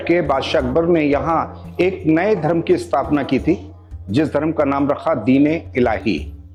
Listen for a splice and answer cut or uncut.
uncut